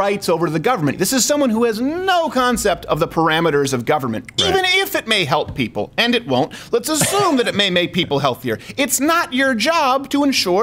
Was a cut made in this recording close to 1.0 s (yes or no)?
yes